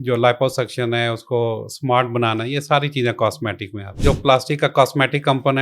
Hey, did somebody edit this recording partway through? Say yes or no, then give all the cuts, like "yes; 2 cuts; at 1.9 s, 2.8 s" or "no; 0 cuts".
yes; 1 cut; at 4.0 s